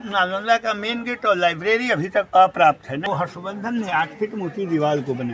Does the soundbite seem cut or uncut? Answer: cut